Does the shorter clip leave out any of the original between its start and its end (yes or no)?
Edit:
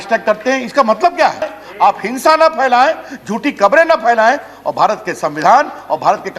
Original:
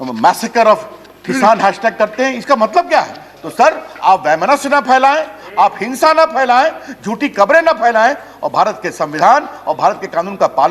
yes